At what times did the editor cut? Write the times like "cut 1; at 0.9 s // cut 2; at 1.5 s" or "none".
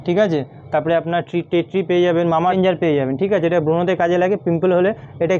cut 1; at 2.6 s